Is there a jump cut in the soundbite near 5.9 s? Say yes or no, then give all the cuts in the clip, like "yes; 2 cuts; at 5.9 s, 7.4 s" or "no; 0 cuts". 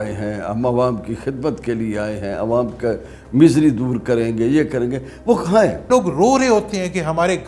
yes; 1 cut; at 5.9 s